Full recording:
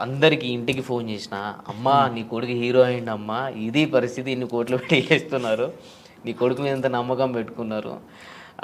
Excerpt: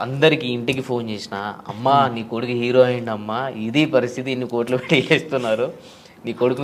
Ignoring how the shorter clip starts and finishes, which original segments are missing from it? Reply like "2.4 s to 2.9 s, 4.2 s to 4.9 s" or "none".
none